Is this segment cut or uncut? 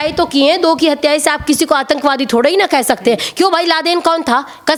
uncut